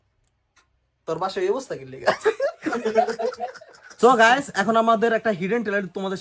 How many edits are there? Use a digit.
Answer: 1